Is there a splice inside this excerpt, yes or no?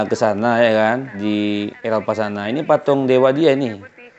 yes